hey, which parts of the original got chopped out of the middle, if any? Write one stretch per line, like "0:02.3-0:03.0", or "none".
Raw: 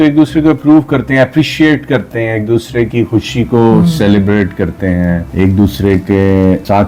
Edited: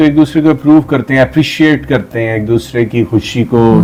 none